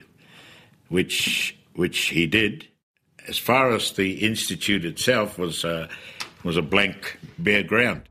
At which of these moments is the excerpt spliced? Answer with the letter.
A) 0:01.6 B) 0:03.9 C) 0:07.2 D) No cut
C